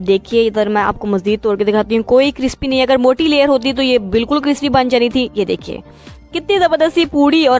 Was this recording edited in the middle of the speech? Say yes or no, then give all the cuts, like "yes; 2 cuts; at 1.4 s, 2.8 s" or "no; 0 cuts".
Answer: no; 0 cuts